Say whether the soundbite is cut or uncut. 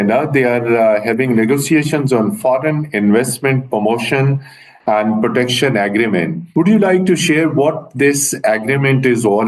cut